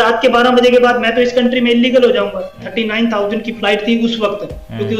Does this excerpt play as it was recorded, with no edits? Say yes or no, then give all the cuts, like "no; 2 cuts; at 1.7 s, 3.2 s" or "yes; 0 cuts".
no; 1 cut; at 2.7 s